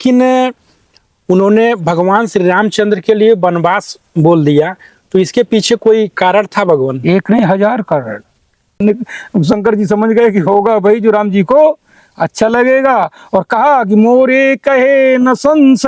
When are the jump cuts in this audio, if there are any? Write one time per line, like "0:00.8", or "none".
0:08.8